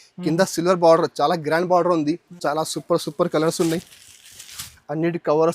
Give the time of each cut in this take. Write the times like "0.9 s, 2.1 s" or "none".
2.3 s